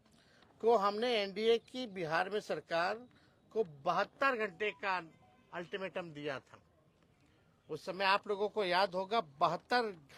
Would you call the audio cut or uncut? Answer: uncut